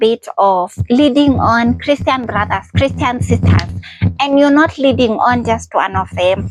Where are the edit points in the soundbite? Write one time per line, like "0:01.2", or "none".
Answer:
none